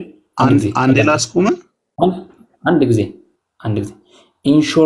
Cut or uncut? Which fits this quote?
uncut